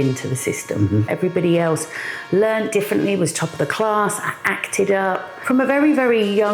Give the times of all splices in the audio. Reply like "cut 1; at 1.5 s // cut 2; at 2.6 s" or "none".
cut 1; at 1.1 s // cut 2; at 5.3 s

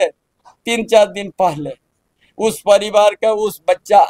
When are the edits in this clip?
none

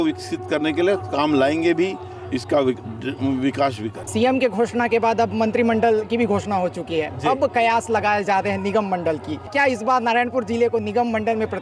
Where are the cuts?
cut 1; at 3.9 s

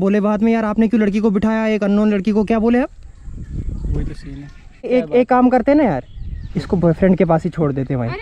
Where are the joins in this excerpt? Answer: none

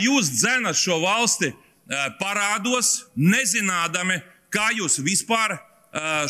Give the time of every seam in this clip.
none

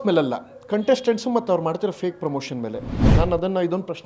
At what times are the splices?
cut 1; at 2.9 s

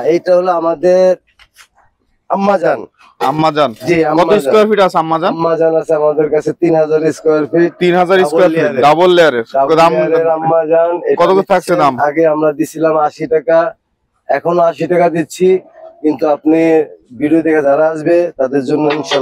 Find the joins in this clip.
none

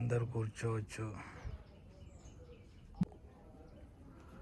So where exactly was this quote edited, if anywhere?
none

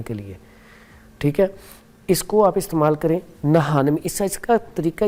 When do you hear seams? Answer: none

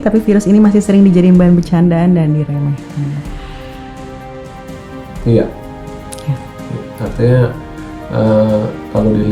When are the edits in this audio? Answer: none

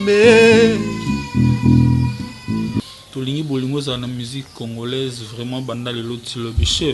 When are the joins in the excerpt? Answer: cut 1; at 2.8 s

